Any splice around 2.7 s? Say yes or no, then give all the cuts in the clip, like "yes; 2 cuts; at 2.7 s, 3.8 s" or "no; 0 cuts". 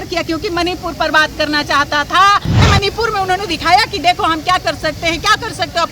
yes; 1 cut; at 2.7 s